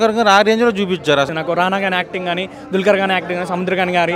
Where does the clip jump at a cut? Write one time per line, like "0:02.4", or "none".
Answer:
0:01.3